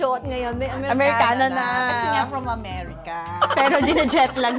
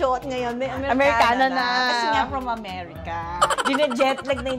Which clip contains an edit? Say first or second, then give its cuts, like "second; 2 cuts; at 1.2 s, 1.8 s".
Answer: second; 1 cut; at 3.5 s